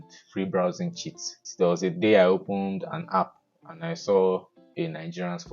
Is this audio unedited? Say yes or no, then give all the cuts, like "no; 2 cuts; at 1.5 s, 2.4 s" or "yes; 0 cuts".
no; 1 cut; at 1.4 s